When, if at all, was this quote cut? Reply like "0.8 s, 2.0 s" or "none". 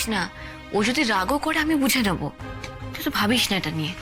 none